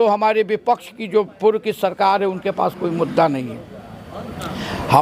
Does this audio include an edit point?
no; 0 cuts

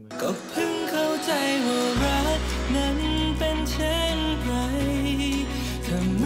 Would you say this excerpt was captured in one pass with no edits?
yes; 0 cuts

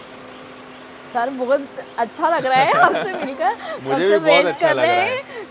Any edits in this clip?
no; 0 cuts

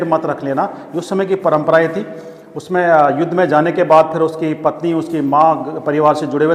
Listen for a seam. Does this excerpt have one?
no; 0 cuts

